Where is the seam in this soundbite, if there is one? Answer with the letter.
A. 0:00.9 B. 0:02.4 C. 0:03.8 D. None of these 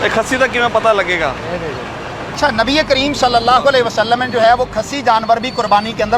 B